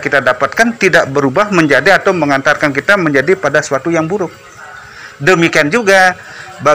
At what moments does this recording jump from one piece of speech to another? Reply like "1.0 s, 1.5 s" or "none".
none